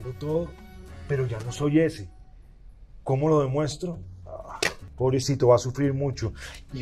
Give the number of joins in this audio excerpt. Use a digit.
1